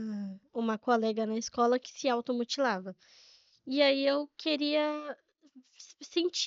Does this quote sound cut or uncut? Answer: uncut